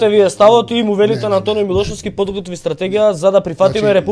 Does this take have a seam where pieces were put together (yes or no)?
no